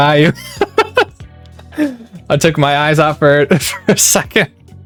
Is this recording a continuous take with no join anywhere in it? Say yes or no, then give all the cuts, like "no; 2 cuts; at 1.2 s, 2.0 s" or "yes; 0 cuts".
yes; 0 cuts